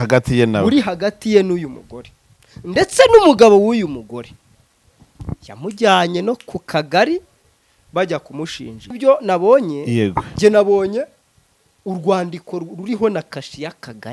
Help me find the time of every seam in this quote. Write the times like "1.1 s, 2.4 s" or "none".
8.9 s

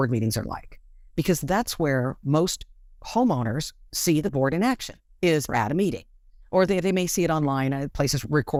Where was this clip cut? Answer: none

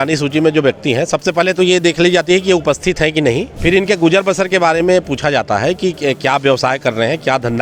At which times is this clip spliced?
3.5 s

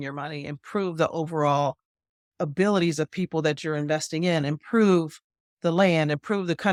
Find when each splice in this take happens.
none

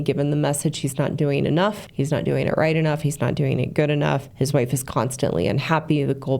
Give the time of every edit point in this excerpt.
1.8 s, 4.3 s

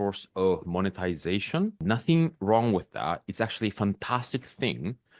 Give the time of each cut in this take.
1.8 s

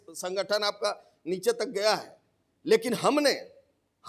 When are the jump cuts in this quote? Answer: none

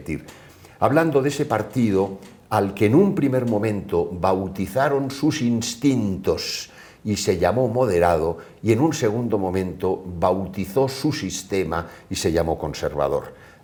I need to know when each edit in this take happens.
none

